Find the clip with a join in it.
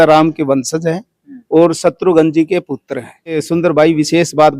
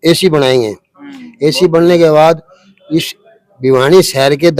first; 1 cut; at 3.4 s

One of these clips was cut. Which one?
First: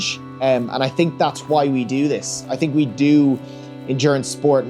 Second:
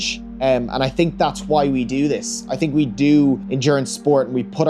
second; 1 cut; at 3.5 s

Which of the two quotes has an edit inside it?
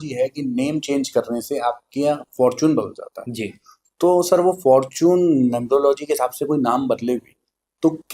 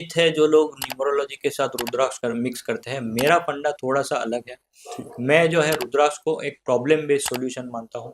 second; 1 cut; at 2.2 s

